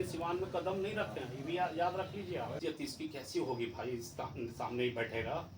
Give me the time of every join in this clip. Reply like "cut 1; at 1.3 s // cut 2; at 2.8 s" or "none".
cut 1; at 2.6 s